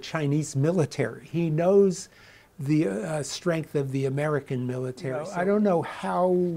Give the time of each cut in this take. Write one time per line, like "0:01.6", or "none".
0:05.3